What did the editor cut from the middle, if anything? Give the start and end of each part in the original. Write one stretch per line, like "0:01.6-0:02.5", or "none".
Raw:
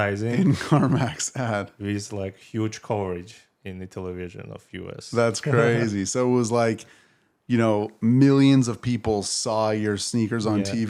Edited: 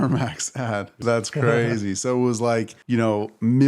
0:01.7-0:05.0
0:06.9-0:07.4